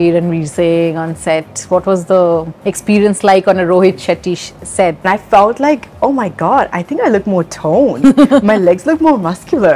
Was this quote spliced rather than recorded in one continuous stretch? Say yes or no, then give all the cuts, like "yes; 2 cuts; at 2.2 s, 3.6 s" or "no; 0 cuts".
yes; 1 cut; at 5.0 s